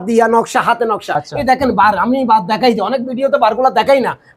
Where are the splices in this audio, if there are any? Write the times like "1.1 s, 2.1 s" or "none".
1.2 s